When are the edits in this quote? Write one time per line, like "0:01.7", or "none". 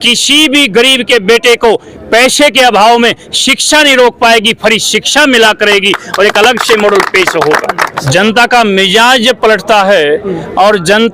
0:07.9